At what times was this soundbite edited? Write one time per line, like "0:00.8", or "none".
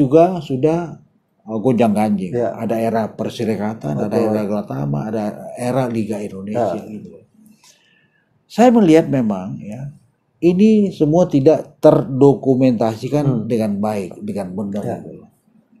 none

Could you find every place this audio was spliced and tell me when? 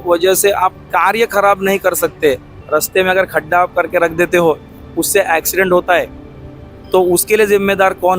0:02.5

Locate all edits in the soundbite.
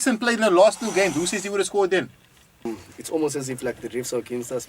0:02.7

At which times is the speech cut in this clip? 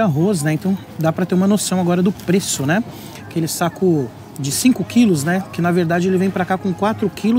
none

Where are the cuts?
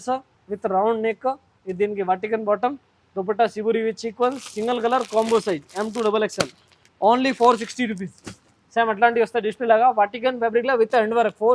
none

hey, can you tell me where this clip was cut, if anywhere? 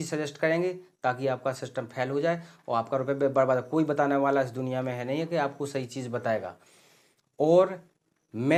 none

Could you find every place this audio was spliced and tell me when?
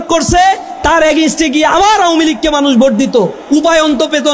none

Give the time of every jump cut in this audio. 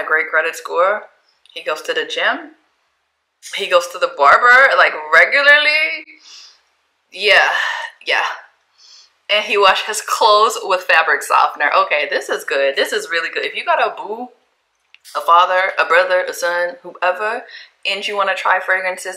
none

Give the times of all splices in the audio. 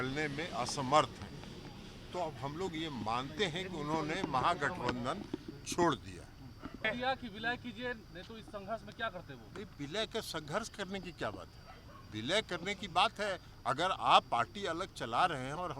0:06.8

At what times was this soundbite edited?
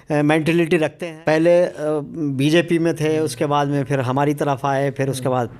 0:00.9

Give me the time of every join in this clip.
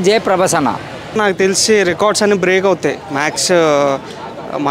0:01.2

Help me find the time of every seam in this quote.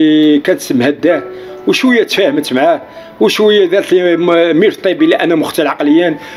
none

